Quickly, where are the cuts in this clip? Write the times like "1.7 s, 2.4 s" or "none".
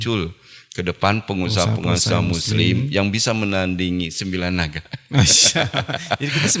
none